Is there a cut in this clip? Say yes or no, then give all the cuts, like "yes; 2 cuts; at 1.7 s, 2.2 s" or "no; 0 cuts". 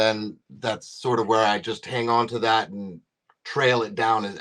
no; 0 cuts